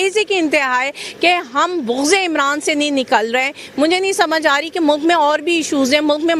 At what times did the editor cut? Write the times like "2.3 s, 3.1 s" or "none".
none